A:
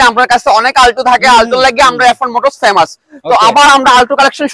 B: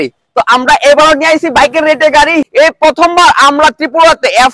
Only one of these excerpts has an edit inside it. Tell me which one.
B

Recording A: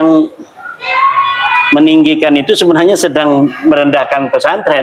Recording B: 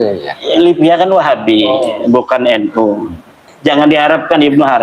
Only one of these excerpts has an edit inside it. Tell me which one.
B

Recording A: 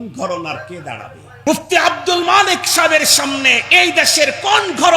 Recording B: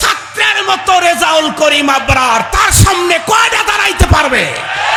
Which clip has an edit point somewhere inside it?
A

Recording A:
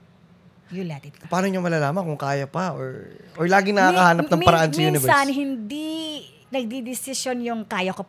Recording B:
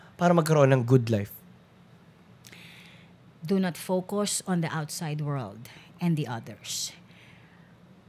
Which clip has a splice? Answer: A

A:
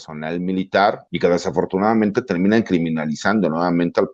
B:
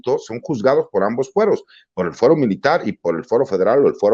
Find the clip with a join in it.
A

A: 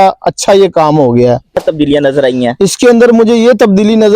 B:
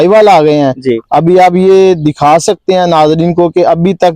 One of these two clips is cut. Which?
A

